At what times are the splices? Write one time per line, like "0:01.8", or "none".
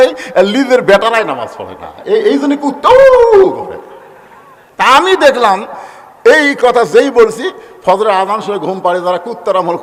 none